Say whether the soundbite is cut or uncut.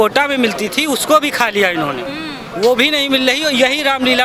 uncut